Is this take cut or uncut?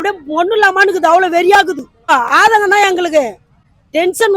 uncut